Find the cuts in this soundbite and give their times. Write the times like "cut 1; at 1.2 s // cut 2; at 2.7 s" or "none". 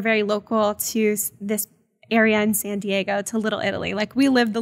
none